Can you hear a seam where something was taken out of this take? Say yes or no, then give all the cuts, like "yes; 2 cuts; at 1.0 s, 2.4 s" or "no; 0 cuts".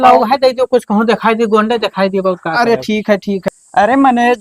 yes; 1 cut; at 3.5 s